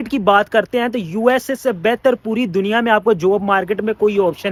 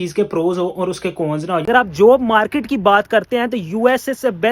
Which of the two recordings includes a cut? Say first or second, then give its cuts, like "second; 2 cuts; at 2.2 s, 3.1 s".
second; 1 cut; at 1.7 s